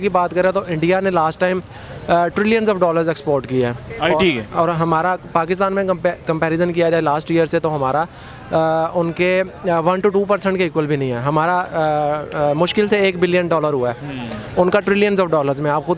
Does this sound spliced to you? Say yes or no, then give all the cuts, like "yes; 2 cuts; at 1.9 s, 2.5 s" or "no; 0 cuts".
no; 0 cuts